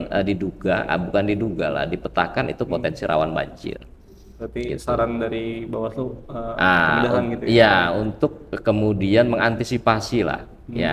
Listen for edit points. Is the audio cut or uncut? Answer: uncut